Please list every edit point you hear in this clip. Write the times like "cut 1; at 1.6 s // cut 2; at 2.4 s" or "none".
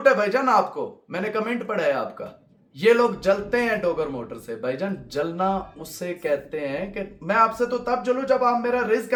none